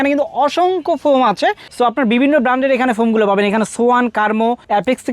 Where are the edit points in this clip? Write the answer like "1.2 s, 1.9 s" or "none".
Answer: none